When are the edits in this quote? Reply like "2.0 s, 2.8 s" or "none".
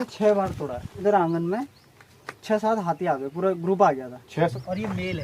1.0 s, 4.5 s